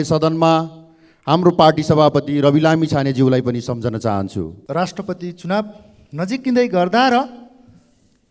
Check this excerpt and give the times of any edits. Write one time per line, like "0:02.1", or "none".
0:04.6